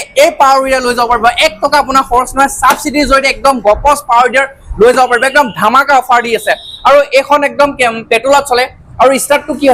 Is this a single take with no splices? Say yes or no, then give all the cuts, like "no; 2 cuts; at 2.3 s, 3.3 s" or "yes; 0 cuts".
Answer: yes; 0 cuts